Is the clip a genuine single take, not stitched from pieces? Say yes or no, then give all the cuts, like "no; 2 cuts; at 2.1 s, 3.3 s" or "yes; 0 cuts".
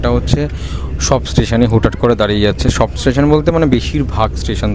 yes; 0 cuts